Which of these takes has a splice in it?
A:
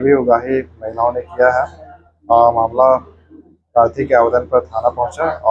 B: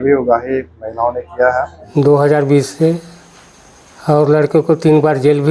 B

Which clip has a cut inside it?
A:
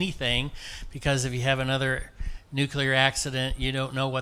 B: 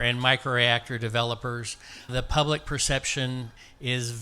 B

